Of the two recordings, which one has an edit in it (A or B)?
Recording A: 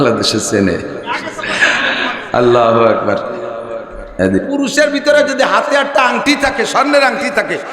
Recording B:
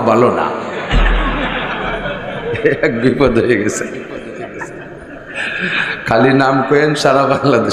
A